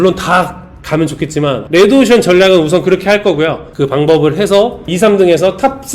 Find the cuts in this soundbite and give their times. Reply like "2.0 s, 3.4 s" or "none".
1.6 s, 3.7 s, 4.9 s